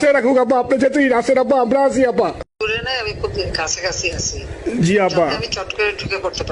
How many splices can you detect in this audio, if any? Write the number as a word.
two